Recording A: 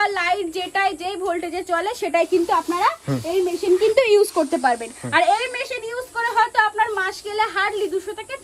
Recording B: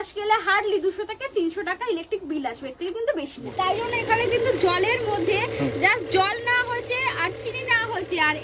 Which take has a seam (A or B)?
B